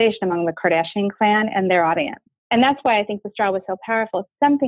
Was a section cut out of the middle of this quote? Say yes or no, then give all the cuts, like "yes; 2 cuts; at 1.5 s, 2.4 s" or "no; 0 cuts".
yes; 1 cut; at 2.4 s